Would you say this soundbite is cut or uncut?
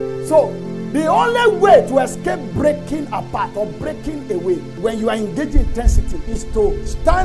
cut